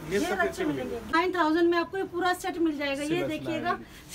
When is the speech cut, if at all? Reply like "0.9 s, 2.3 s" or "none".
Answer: 1.1 s